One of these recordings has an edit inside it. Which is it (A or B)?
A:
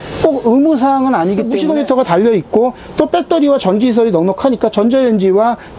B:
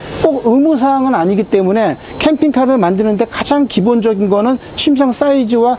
A